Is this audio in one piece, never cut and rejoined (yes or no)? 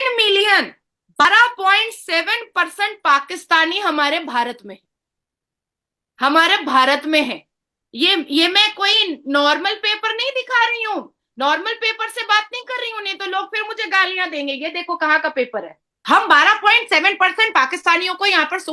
no